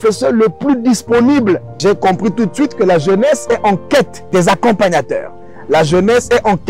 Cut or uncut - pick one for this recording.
cut